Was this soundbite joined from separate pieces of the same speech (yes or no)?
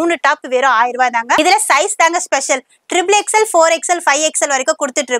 yes